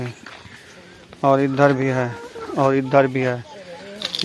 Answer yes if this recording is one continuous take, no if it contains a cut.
yes